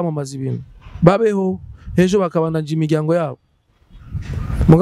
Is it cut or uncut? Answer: uncut